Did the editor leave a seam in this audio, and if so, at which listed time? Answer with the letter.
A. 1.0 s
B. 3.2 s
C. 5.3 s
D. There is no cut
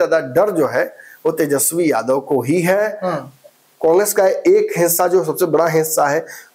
D